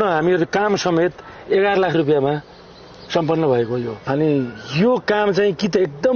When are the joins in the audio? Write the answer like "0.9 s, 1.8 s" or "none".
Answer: 3.9 s